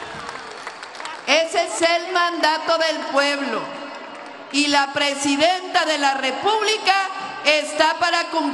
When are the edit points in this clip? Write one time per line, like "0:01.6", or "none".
none